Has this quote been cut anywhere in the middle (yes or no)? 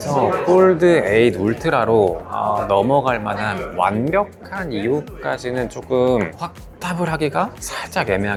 no